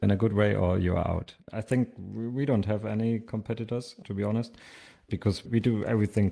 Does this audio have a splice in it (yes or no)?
yes